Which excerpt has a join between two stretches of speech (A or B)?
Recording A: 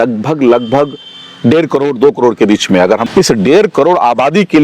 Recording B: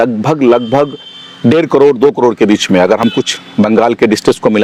A